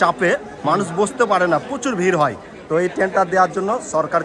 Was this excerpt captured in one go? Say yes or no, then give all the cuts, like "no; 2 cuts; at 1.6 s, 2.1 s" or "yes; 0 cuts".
yes; 0 cuts